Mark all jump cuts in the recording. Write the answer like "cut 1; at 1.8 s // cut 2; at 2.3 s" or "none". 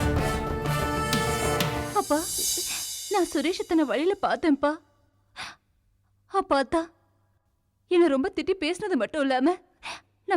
cut 1; at 1.8 s